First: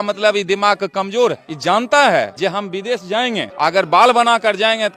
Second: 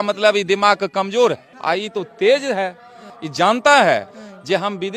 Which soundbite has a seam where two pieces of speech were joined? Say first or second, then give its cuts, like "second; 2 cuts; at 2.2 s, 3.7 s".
first; 3 cuts; at 1.5 s, 2.3 s, 3.5 s